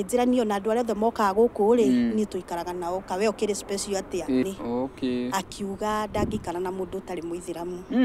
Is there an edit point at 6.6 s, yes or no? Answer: no